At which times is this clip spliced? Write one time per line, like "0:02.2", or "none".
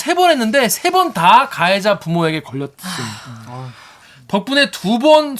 0:03.9